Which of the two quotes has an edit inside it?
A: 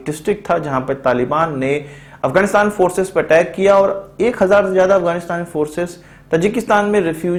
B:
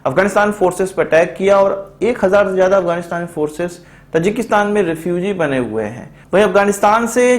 B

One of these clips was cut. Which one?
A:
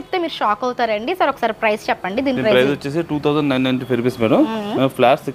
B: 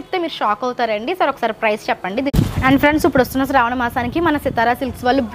B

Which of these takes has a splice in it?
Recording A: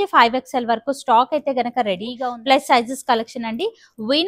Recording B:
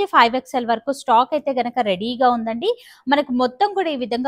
A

